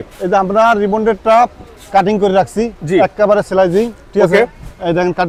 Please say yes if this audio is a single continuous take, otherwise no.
yes